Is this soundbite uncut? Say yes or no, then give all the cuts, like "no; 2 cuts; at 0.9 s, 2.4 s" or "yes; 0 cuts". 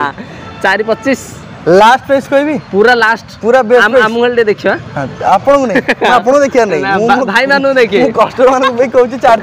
yes; 0 cuts